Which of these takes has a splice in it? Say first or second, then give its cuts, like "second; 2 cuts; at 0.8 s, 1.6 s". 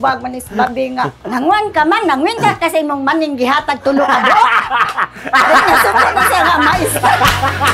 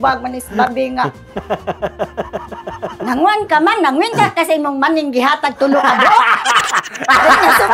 first; 1 cut; at 1.2 s